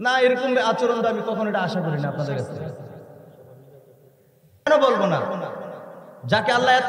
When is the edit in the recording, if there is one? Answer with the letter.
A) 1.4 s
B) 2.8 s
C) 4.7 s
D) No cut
C